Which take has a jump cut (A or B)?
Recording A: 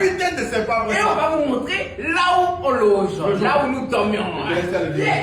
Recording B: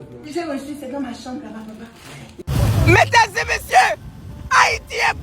B